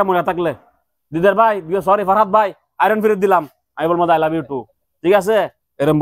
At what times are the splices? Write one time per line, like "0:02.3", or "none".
none